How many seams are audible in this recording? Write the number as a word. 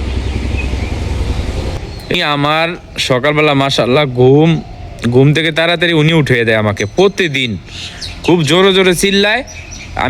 one